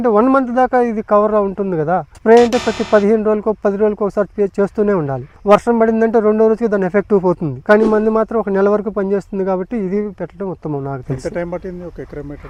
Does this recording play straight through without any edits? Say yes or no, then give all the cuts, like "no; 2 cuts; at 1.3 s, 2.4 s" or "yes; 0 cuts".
yes; 0 cuts